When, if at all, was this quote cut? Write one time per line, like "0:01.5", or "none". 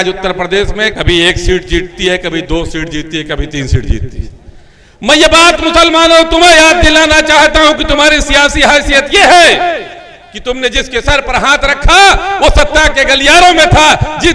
0:00.9